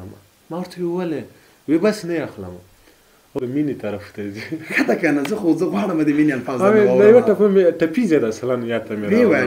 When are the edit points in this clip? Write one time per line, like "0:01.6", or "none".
0:03.4

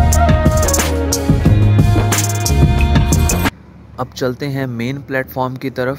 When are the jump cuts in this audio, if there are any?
none

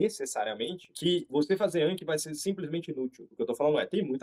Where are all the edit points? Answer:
none

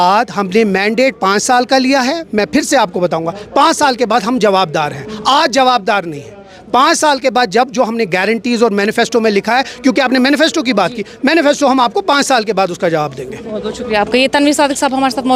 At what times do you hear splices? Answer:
none

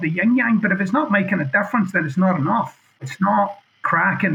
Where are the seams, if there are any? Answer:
0:03.1

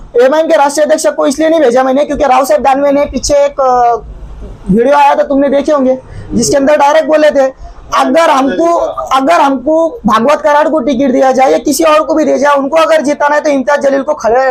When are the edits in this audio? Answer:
none

